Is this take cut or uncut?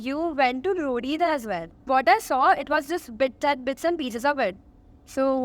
cut